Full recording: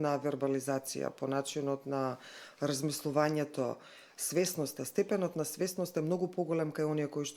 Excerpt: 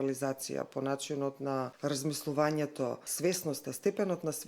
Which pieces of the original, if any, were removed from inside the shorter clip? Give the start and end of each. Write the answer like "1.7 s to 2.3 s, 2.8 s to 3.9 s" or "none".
2.2 s to 2.5 s, 3.8 s to 4.2 s